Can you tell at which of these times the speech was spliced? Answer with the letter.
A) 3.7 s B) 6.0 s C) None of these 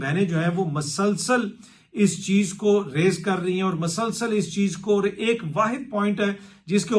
C